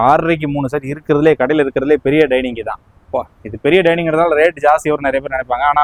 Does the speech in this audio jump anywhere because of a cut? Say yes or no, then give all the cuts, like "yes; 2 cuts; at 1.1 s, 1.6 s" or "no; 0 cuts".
no; 0 cuts